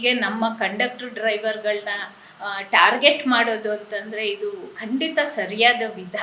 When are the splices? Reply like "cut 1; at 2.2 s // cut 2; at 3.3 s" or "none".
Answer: none